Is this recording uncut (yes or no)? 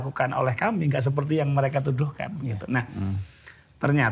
yes